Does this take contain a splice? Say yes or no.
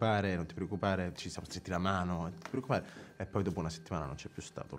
no